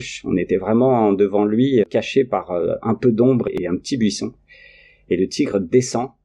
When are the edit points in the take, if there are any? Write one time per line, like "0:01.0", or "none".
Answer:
0:01.9